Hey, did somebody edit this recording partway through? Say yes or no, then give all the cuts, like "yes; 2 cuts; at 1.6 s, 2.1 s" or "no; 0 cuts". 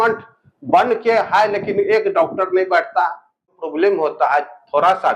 yes; 1 cut; at 3.6 s